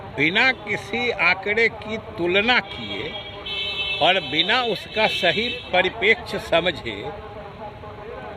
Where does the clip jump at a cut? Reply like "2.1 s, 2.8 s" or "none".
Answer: none